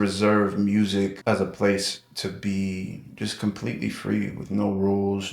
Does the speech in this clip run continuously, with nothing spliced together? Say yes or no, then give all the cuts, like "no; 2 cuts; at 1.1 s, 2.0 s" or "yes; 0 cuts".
no; 1 cut; at 1.2 s